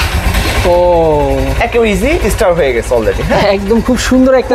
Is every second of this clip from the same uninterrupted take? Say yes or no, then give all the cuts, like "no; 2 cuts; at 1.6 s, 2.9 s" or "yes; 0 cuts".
yes; 0 cuts